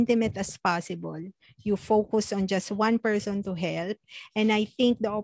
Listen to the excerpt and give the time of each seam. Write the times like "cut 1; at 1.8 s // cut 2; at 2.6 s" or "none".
none